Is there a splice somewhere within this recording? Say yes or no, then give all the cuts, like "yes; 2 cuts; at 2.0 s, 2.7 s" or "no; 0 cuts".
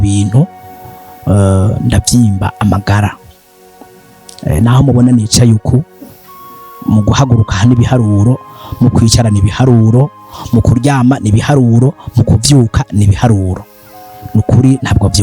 no; 0 cuts